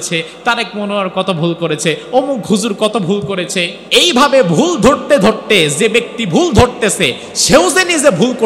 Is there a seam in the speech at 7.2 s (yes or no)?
no